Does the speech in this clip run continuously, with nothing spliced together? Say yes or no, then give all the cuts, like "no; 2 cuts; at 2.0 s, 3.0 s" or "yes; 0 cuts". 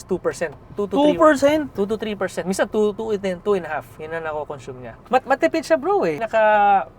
no; 3 cuts; at 3.0 s, 5.0 s, 6.2 s